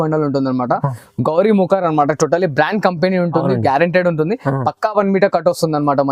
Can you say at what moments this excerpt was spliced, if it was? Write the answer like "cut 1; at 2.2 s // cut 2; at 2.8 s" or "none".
none